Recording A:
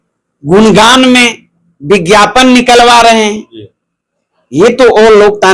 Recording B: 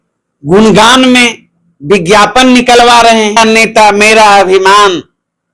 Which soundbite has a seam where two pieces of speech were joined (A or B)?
B